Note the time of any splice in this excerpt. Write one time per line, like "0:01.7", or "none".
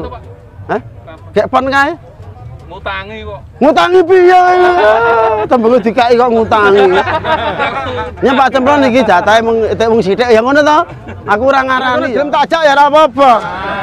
0:12.1